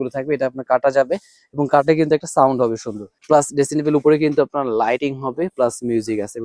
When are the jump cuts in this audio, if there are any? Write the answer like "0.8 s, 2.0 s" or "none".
3.1 s